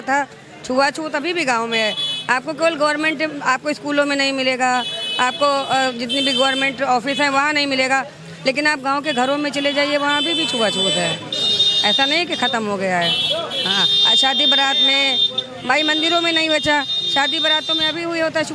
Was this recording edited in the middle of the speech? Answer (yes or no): no